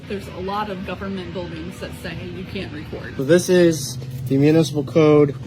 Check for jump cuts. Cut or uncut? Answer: cut